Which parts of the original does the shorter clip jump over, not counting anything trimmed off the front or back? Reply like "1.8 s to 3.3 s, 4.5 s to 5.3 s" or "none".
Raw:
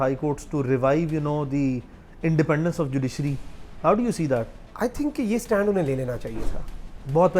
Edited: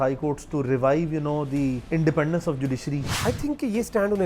1.8 s to 2.1 s, 3.4 s to 4.6 s